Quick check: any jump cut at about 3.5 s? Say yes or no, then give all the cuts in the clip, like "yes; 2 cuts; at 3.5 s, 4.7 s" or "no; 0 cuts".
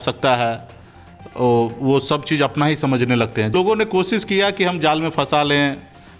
yes; 1 cut; at 3.5 s